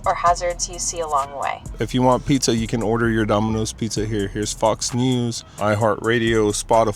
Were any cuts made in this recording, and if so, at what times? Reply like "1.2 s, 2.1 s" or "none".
1.7 s, 5.5 s